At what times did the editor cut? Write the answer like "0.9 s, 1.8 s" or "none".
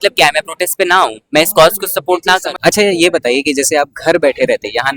2.5 s